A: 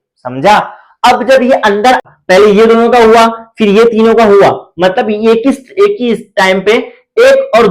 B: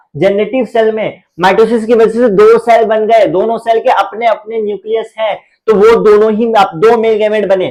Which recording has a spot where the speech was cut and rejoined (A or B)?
A